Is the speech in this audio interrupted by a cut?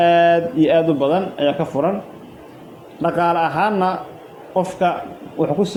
no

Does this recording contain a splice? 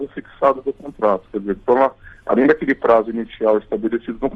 no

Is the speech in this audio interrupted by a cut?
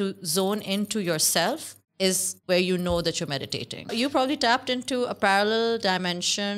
yes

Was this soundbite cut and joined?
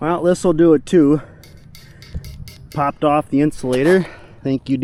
no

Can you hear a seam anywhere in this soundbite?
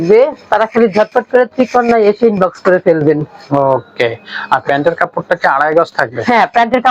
no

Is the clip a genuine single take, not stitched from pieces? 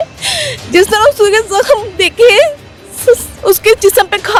yes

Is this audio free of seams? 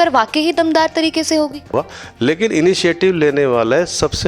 no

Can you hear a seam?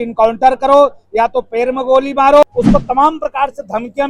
yes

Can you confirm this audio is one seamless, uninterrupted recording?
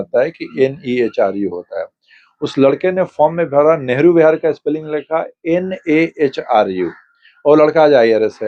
yes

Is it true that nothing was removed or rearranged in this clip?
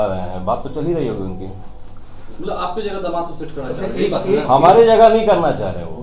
yes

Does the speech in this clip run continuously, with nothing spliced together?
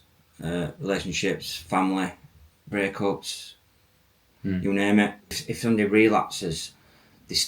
no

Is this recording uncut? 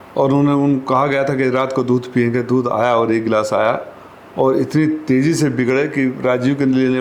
yes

